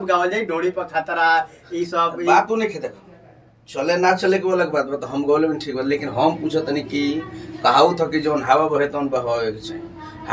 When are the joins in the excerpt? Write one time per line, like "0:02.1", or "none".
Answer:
none